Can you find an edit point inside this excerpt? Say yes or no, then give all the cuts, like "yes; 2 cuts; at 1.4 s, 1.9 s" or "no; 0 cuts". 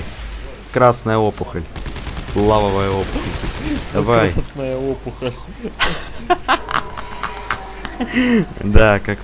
no; 0 cuts